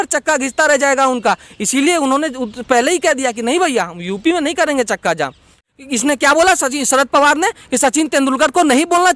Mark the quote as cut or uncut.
cut